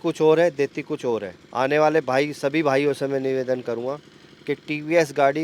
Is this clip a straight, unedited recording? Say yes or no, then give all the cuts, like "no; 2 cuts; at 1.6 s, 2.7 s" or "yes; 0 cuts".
no; 1 cut; at 1.4 s